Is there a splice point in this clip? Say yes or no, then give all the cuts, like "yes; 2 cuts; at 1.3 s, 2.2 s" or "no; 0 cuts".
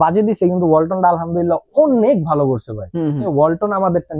yes; 1 cut; at 3.3 s